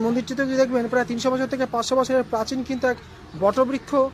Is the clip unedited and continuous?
yes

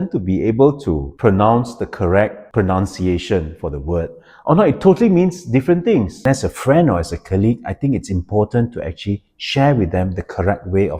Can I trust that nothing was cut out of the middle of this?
no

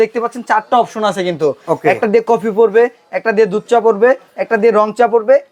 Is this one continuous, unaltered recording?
yes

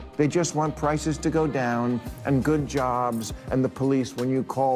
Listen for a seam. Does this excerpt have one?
no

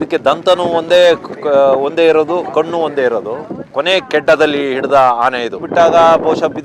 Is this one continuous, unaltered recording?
no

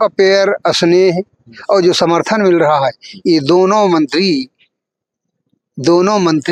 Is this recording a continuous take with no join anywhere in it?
yes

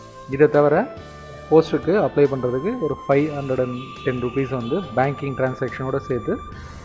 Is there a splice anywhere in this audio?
yes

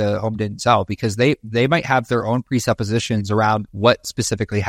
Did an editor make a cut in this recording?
yes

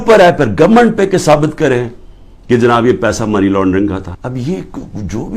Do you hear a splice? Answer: yes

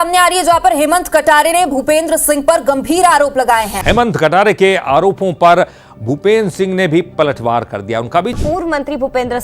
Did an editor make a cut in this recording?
no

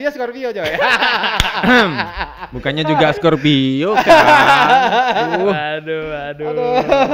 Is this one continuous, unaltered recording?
yes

